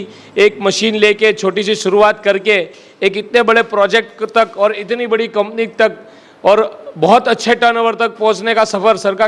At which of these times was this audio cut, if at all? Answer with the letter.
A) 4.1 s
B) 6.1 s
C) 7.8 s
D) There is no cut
D